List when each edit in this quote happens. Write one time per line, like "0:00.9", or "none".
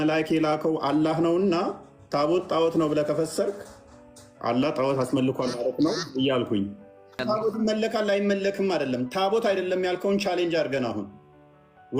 0:07.2